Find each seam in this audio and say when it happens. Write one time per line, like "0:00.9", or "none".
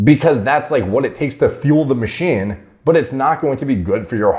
none